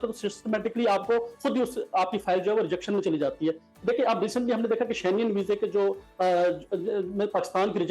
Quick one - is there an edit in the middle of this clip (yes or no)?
no